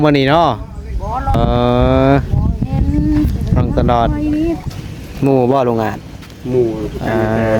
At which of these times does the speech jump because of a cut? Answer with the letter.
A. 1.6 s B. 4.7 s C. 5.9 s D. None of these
B